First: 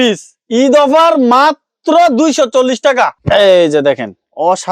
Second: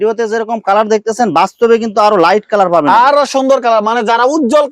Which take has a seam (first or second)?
first